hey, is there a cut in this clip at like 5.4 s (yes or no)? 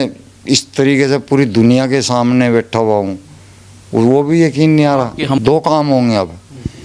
yes